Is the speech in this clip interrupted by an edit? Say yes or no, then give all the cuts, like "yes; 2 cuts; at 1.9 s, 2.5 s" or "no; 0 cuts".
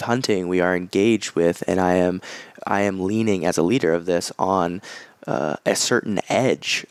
no; 0 cuts